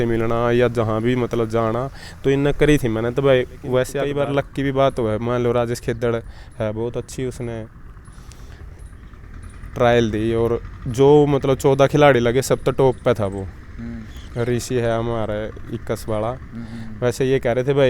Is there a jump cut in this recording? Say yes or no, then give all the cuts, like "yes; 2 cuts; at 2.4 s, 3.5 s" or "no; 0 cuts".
yes; 1 cut; at 4.0 s